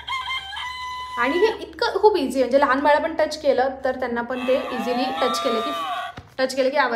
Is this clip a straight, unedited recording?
yes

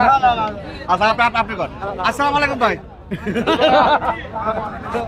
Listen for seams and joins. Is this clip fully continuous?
yes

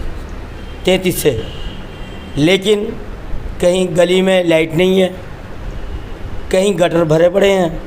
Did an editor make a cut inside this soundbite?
no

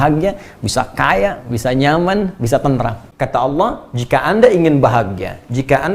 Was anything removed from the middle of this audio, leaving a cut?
yes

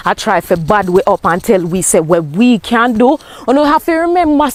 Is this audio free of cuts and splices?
yes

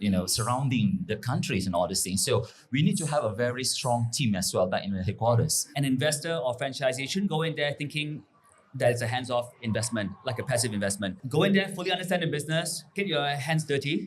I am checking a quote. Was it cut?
yes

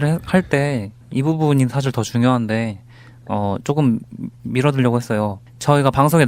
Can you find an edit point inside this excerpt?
no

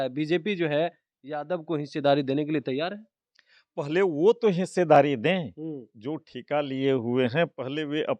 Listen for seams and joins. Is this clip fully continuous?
yes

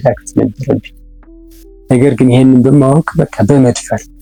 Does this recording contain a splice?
no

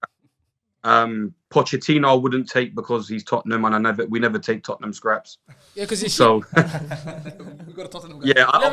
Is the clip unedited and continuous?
no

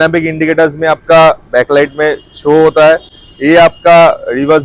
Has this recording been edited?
no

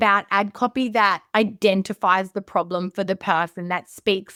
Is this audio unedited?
yes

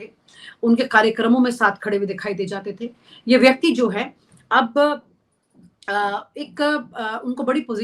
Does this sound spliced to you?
no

